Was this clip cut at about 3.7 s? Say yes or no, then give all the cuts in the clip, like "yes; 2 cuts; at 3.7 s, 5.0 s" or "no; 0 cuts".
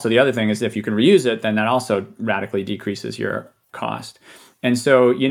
yes; 1 cut; at 3.7 s